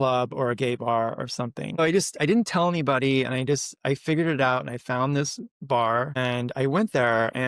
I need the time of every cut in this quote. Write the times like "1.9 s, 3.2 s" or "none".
1.8 s, 6.2 s